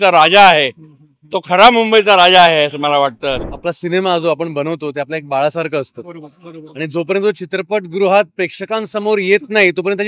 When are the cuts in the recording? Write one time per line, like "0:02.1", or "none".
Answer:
0:03.5